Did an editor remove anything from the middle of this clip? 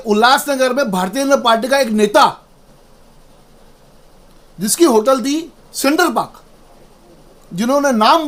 no; 0 cuts

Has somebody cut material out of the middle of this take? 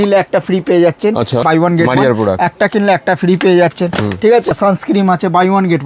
yes; 2 cuts; at 1.4 s, 4.5 s

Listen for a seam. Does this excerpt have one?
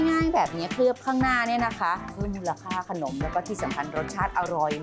no; 0 cuts

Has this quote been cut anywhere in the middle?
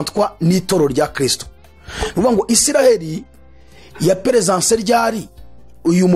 no; 0 cuts

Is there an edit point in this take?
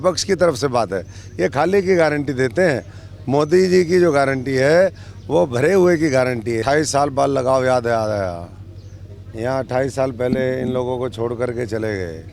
yes; 1 cut; at 6.6 s

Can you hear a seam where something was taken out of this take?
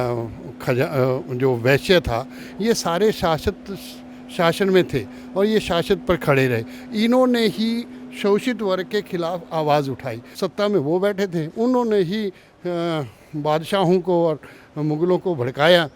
yes; 1 cut; at 10.2 s

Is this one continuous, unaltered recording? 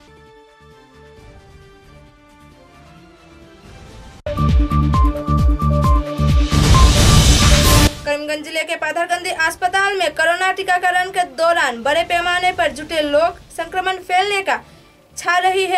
no; 1 cut; at 7.9 s

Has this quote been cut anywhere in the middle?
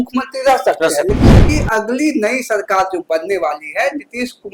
yes; 1 cut; at 1.4 s

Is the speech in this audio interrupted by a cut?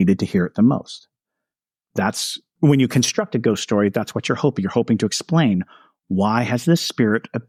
no; 0 cuts

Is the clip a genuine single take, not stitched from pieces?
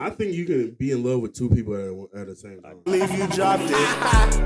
no; 1 cut; at 2.9 s

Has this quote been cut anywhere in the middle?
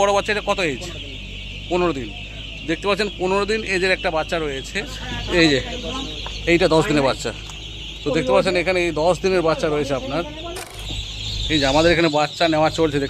yes; 2 cuts; at 5.1 s, 10.7 s

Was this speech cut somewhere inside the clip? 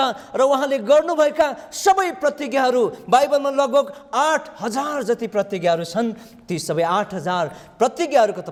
no; 0 cuts

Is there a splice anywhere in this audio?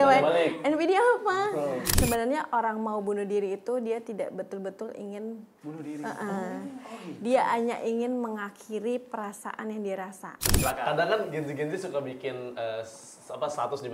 yes; 2 cuts; at 1.9 s, 10.5 s

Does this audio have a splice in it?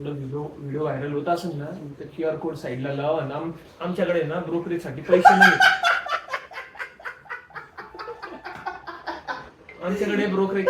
no; 0 cuts

